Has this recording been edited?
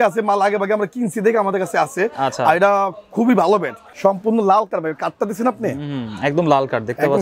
yes; 1 cut; at 3.8 s

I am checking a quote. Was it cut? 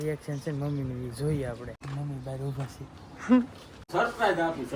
yes; 2 cuts; at 1.8 s, 3.8 s

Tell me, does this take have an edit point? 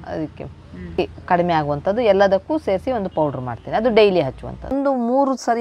yes; 2 cuts; at 1.0 s, 4.7 s

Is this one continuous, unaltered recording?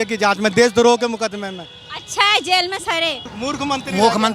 no; 1 cut; at 3.3 s

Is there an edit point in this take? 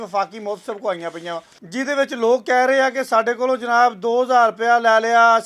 no; 0 cuts

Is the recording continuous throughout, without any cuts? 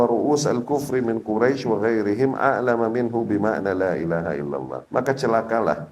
no; 1 cut; at 4.8 s

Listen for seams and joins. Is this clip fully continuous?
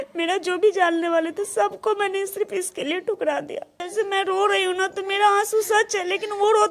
no; 1 cut; at 3.9 s

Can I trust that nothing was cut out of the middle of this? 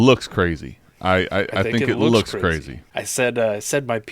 no; 1 cut; at 2.7 s

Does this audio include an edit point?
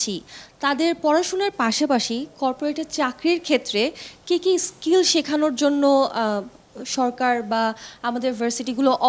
no; 0 cuts

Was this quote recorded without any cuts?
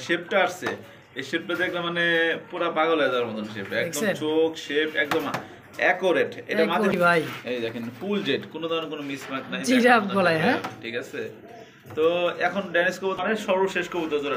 no; 2 cuts; at 6.9 s, 13.2 s

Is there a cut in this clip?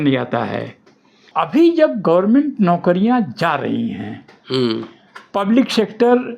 yes; 1 cut; at 1.3 s

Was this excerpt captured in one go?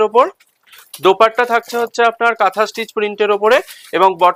yes; 0 cuts

